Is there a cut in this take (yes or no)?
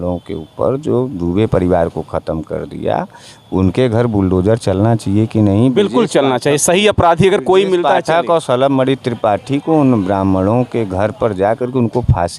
no